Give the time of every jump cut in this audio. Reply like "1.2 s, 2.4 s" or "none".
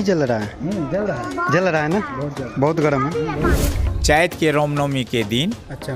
3.9 s